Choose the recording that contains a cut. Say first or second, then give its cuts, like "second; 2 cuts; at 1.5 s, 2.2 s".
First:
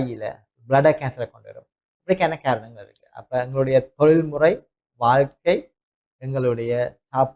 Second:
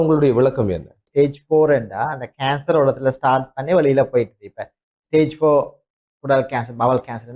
second; 1 cut; at 1.0 s